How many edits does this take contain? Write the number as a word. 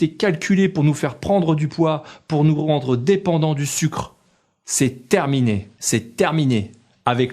one